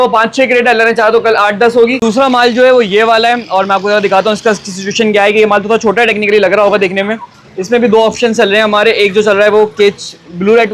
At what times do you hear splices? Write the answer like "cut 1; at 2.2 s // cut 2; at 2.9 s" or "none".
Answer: cut 1; at 2.0 s